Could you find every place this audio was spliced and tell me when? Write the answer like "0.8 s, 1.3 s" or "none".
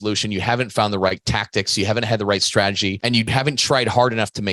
3.3 s